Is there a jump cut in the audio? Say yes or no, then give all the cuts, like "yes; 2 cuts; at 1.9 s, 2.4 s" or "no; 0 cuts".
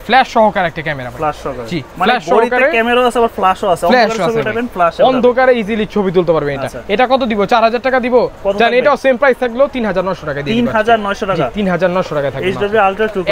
no; 0 cuts